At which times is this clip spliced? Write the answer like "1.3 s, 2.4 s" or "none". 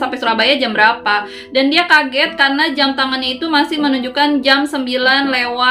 none